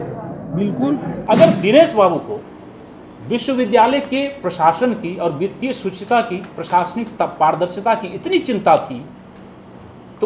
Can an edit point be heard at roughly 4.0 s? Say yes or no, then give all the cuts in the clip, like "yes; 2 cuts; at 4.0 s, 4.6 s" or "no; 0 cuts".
no; 1 cut; at 1.2 s